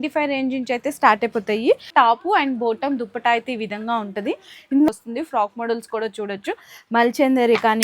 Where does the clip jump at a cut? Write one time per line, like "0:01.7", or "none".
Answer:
0:01.9
0:04.9